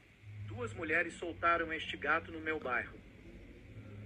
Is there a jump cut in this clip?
no; 0 cuts

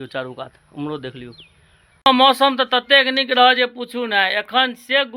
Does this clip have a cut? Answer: yes; 1 cut; at 2.1 s

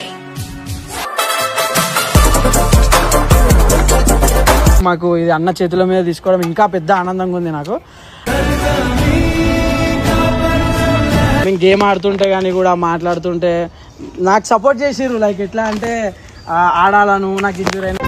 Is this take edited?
yes; 3 cuts; at 1.1 s, 4.8 s, 11.4 s

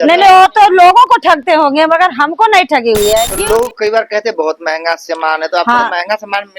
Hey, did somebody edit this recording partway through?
yes; 1 cut; at 3.3 s

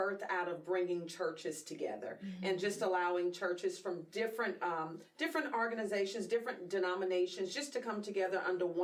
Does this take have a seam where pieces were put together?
no; 0 cuts

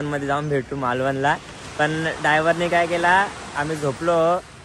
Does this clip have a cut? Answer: no; 0 cuts

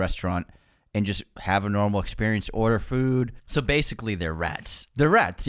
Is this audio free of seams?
no; 1 cut; at 3.4 s

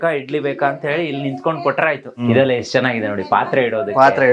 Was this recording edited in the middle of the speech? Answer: yes; 1 cut; at 2.2 s

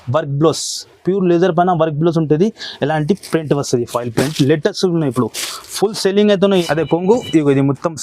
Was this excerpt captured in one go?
no; 1 cut; at 6.6 s

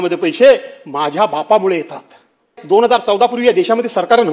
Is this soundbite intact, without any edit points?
no; 1 cut; at 2.6 s

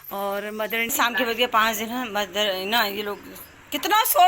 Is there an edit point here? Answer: yes; 1 cut; at 0.9 s

